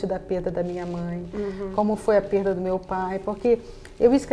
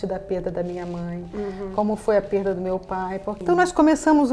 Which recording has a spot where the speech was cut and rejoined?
second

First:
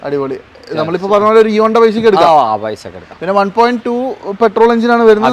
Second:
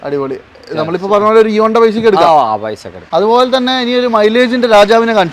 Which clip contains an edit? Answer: second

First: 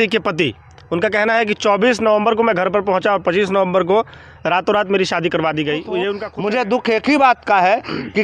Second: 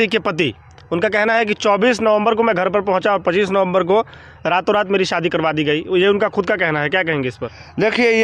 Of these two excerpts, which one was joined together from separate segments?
first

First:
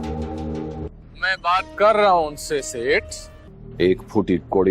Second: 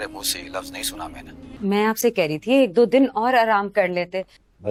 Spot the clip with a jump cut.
first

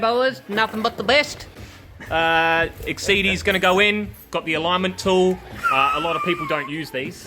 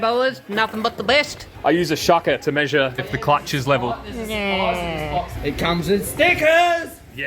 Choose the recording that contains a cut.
second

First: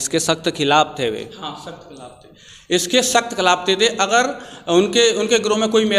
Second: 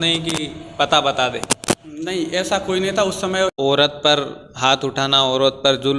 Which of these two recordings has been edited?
second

